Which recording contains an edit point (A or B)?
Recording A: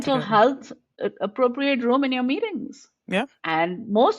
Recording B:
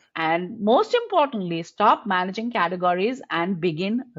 A